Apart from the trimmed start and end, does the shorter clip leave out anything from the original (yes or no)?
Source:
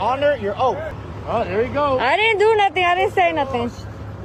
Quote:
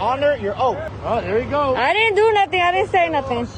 yes